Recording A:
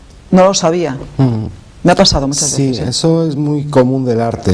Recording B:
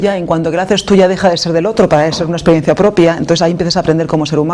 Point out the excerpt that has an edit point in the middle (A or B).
A